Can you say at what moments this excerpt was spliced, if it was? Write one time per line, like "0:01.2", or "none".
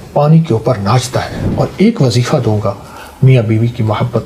0:01.4